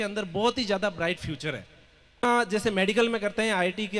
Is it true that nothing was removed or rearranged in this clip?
no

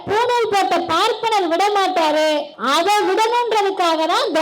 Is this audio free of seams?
no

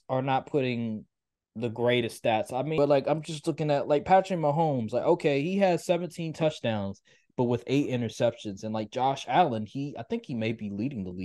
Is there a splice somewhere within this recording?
yes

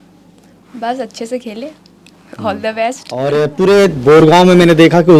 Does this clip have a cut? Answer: yes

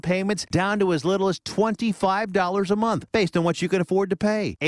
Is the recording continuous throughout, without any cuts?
yes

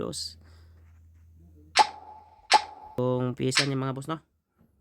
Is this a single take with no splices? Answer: no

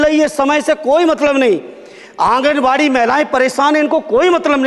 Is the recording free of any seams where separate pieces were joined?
yes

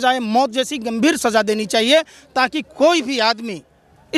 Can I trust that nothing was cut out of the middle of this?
yes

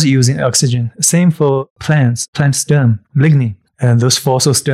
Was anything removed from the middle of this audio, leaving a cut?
yes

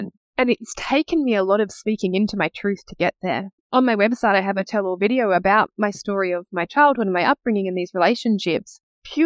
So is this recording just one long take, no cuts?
no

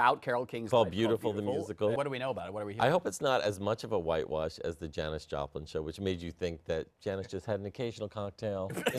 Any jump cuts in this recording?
yes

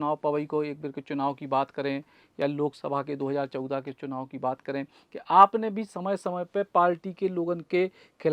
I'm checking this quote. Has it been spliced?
no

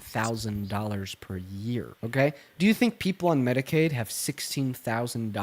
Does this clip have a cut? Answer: yes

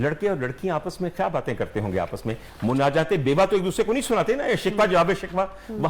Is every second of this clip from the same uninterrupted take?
yes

